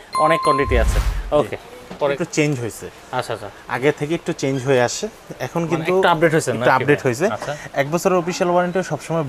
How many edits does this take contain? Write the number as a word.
one